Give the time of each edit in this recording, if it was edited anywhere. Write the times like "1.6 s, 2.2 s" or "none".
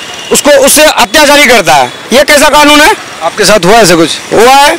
none